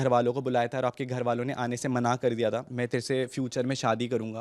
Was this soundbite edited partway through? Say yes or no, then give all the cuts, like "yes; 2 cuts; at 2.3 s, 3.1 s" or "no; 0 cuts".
yes; 1 cut; at 2.7 s